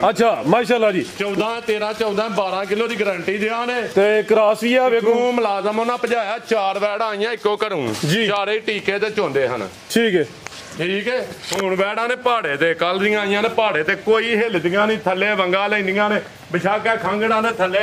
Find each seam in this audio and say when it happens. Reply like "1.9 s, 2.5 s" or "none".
none